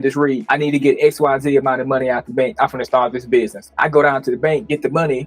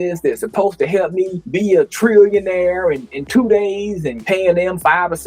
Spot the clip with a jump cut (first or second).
first